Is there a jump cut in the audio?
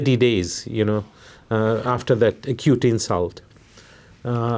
no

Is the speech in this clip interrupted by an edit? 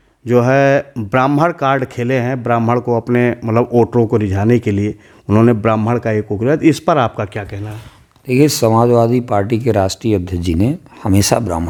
no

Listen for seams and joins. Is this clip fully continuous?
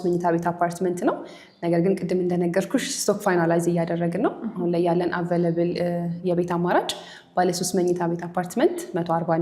yes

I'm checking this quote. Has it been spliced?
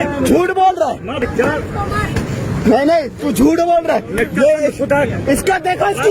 yes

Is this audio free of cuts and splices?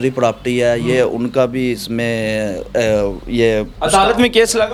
yes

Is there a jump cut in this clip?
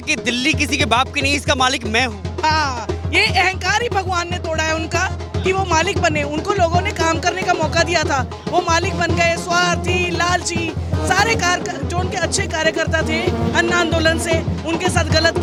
no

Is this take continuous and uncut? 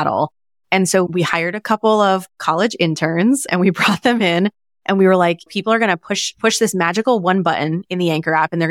no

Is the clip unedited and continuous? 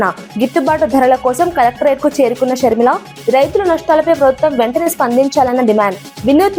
yes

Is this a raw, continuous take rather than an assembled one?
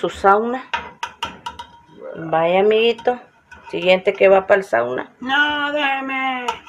yes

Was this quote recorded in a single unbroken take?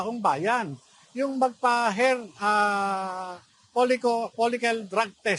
yes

